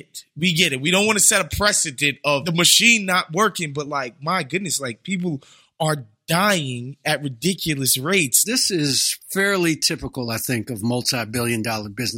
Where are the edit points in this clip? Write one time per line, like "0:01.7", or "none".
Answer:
0:02.4
0:08.4